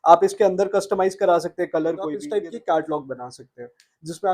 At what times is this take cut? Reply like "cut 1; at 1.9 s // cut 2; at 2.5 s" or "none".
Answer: cut 1; at 2.2 s